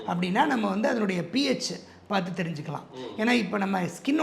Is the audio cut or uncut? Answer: uncut